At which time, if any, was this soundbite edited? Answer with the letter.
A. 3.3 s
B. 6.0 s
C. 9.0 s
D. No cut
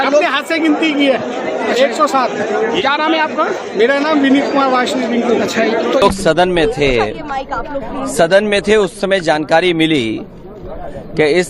B